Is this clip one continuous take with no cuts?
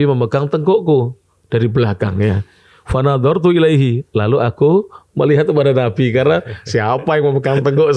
yes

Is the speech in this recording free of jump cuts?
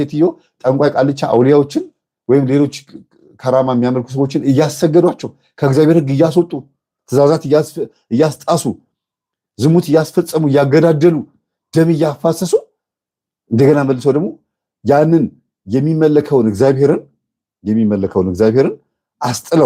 yes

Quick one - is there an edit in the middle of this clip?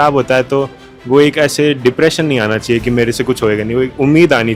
no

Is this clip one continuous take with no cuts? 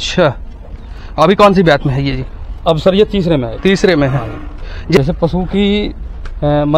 no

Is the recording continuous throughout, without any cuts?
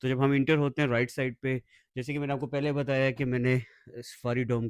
yes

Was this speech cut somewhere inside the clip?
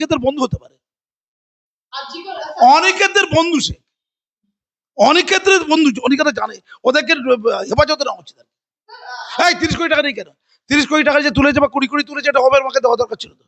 no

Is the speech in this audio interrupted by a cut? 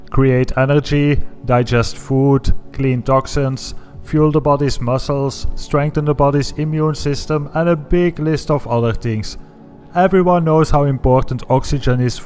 yes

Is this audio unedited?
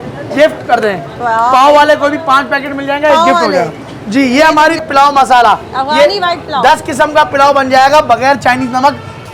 no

